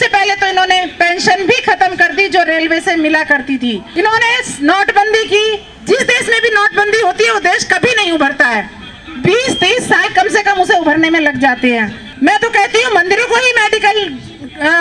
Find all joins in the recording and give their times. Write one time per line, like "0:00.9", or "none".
0:03.8
0:12.0

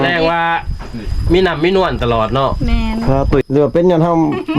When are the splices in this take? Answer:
0:03.4

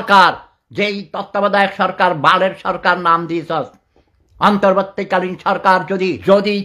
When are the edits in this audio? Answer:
none

